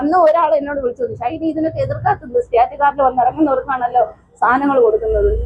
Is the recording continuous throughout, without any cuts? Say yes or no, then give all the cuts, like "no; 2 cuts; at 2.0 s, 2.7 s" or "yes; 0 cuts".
yes; 0 cuts